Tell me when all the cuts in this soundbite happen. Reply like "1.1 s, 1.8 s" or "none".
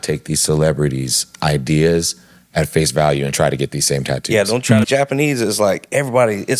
4.8 s